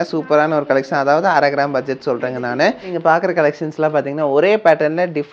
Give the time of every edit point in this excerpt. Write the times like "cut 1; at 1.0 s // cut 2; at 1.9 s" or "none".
cut 1; at 2.9 s